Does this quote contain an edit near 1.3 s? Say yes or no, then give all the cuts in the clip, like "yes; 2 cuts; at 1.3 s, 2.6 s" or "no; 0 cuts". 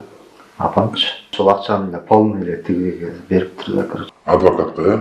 yes; 1 cut; at 1.3 s